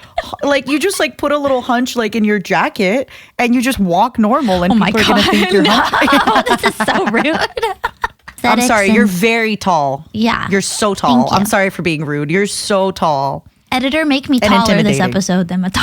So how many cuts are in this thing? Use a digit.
1